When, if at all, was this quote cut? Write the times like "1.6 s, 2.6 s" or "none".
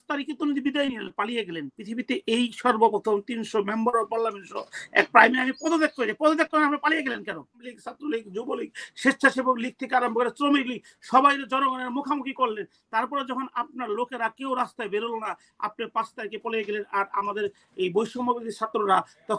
7.7 s